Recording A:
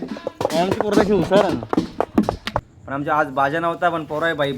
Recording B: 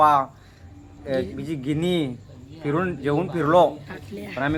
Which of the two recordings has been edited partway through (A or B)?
A